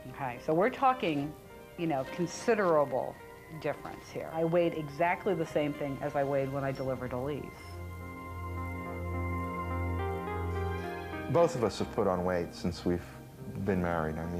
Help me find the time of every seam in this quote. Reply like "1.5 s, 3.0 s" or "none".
none